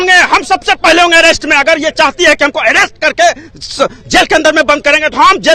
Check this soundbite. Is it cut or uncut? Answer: uncut